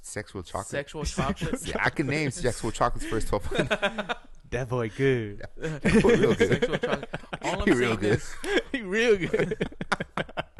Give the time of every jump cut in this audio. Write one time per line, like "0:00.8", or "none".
none